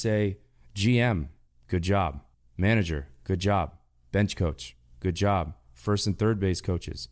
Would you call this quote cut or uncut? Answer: uncut